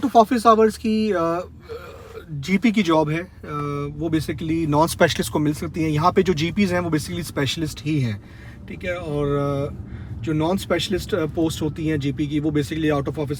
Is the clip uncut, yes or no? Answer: yes